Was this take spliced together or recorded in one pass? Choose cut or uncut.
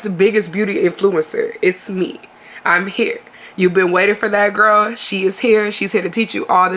uncut